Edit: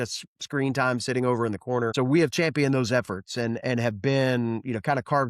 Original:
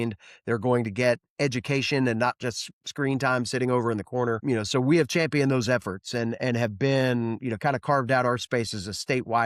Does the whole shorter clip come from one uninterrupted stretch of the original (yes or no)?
no